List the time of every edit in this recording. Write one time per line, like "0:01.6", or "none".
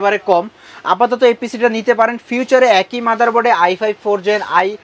none